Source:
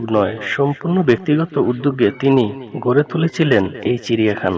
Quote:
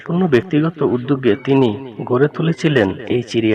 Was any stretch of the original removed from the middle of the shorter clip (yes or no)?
no